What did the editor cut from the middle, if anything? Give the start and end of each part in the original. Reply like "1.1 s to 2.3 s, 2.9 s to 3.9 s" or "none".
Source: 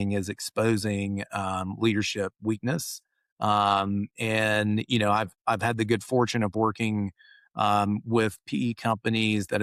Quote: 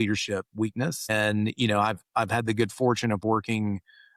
3.0 s to 4.4 s